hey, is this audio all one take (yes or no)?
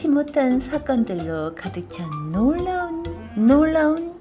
no